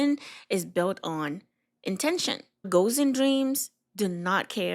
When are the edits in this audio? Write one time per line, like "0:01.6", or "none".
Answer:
0:02.6